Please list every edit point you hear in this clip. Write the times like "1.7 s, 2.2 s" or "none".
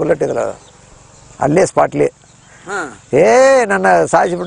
none